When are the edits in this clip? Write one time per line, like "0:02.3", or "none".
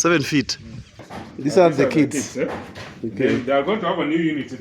0:01.0